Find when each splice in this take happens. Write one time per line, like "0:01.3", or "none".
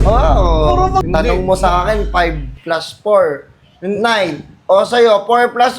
0:01.0